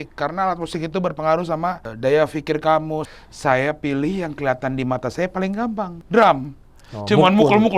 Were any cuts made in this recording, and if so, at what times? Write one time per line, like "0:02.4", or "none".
0:01.9
0:03.1
0:06.0